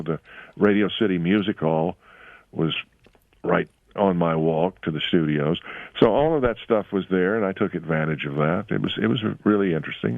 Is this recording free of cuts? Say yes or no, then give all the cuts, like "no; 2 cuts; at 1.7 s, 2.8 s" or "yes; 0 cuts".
no; 1 cut; at 3.9 s